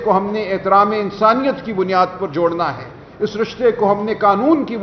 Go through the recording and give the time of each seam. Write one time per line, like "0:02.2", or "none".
none